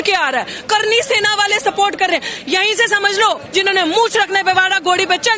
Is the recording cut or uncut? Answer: cut